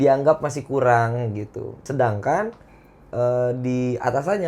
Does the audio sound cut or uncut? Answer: cut